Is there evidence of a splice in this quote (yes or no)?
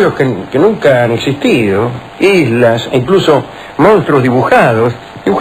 yes